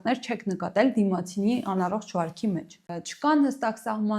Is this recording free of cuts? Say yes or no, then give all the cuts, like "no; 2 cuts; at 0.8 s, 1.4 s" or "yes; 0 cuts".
no; 1 cut; at 3.0 s